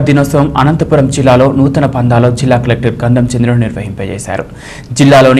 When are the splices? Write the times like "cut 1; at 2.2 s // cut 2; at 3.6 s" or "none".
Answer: none